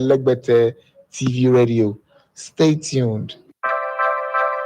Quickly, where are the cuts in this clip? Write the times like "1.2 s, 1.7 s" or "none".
3.7 s